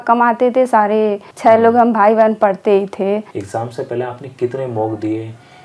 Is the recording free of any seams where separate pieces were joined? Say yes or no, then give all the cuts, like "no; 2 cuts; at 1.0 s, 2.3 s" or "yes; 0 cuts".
no; 1 cut; at 3.3 s